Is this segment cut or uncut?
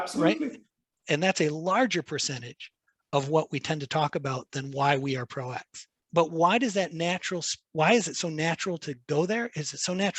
cut